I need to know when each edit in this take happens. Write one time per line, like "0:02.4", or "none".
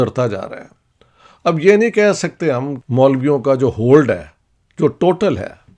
0:02.7